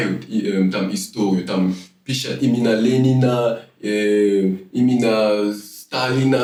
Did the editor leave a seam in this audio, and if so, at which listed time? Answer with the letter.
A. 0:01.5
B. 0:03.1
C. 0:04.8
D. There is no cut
D